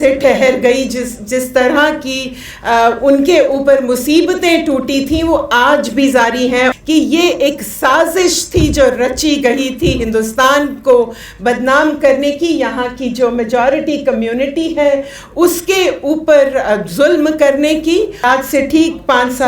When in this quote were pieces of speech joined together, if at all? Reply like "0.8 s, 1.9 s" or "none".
6.7 s, 18.2 s

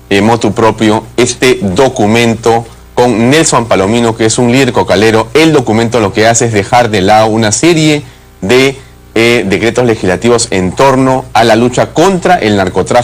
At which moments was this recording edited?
9.5 s

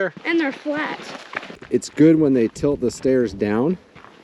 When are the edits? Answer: 1.5 s

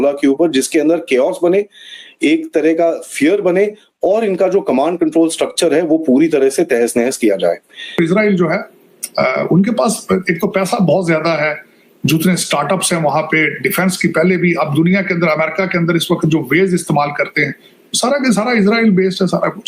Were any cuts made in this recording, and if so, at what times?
8.0 s

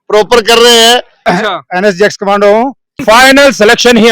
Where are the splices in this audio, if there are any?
1.1 s, 3.0 s

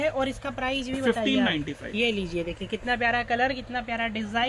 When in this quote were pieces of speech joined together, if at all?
none

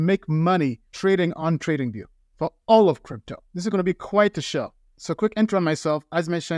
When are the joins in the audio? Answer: none

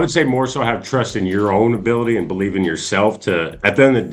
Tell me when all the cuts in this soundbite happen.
none

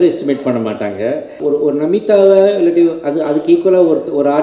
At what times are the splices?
1.3 s

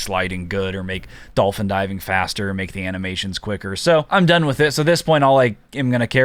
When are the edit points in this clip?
4.1 s

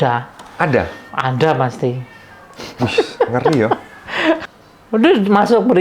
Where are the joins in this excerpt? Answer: 4.5 s

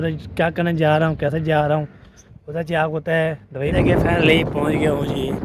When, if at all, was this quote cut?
3.5 s

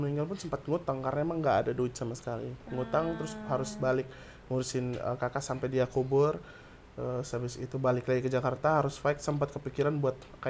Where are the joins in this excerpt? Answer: none

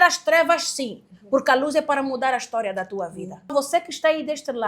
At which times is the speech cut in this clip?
3.5 s

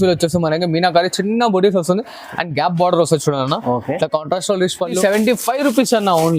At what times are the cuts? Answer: 5.0 s

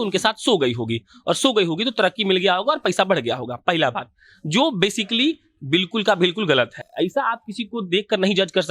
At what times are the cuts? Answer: none

